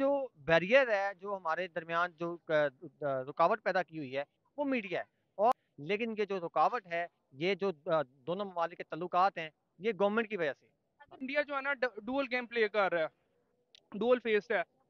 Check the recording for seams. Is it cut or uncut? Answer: cut